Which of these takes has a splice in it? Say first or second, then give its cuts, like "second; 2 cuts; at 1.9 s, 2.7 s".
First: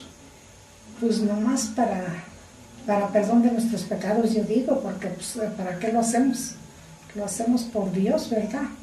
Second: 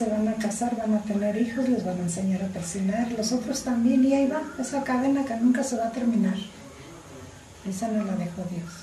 first; 1 cut; at 6.2 s